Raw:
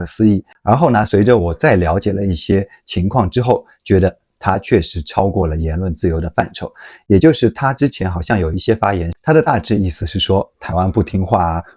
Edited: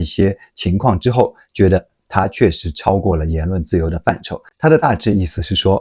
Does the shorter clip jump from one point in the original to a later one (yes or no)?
yes